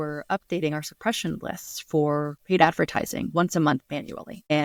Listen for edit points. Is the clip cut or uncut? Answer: uncut